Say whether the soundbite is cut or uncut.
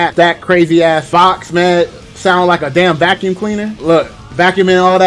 uncut